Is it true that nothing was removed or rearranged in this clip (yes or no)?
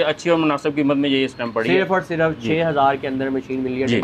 yes